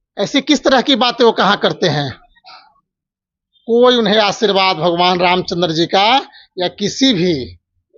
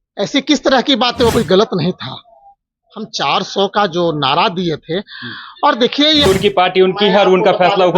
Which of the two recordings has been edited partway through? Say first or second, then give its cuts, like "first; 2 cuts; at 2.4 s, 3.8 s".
second; 2 cuts; at 1.3 s, 6.3 s